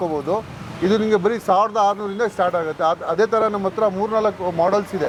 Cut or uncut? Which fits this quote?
uncut